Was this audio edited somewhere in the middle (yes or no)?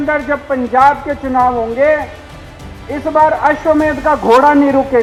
no